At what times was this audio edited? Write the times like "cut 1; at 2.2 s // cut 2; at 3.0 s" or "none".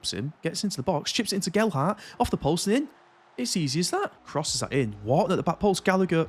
cut 1; at 4.2 s